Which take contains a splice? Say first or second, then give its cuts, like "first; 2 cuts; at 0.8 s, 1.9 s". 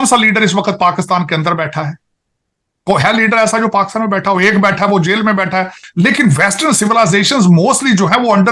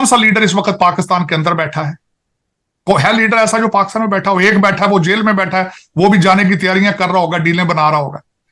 first; 1 cut; at 5.8 s